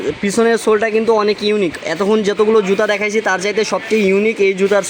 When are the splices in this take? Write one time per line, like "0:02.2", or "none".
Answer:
none